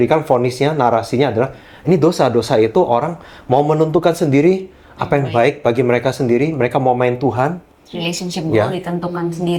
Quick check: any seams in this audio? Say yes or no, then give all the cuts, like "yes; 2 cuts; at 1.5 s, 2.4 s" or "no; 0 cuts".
no; 0 cuts